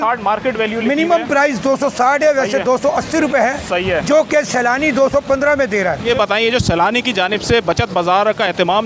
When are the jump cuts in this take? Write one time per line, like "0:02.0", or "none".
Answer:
0:06.0